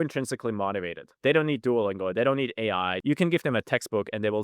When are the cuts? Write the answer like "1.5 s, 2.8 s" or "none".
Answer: 1.2 s, 2.9 s